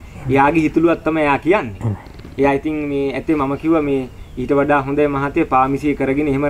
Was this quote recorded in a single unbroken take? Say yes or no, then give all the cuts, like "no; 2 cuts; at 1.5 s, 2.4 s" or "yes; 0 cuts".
yes; 0 cuts